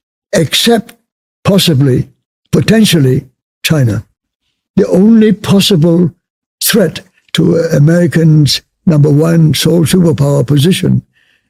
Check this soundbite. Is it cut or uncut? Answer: uncut